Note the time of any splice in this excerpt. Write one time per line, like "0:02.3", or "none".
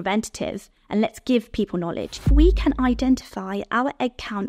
0:02.3